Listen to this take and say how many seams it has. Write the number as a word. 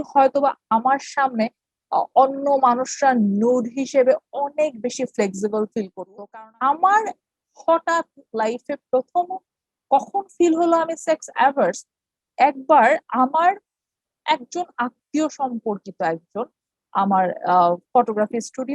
one